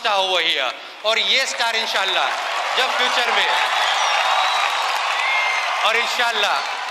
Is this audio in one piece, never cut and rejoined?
yes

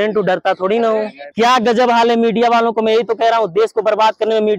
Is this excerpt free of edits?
no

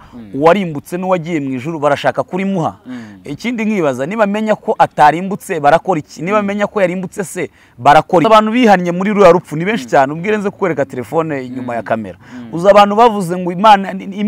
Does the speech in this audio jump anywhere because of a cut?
yes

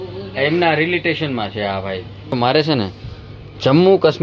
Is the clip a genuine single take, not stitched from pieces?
no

